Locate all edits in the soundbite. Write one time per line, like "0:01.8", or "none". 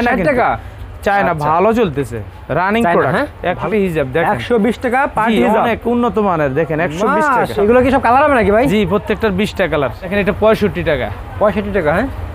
0:03.7
0:07.6
0:10.1